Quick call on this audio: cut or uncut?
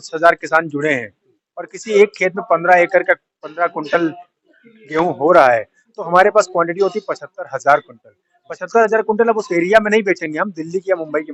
uncut